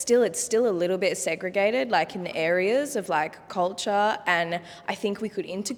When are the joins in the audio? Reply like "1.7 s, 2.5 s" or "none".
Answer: none